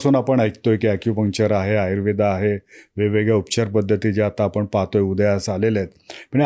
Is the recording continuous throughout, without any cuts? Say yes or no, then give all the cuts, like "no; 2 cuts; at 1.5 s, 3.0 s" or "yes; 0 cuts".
yes; 0 cuts